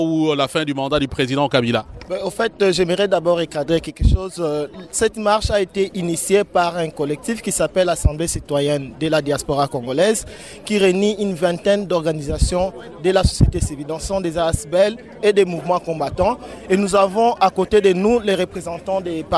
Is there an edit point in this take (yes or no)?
yes